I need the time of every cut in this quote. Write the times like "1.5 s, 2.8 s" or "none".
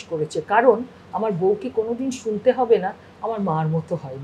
none